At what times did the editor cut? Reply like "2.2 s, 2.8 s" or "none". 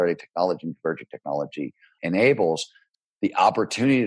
1.9 s, 2.9 s